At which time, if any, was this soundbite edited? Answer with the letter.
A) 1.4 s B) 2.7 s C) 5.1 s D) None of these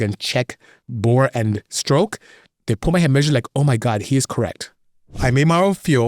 C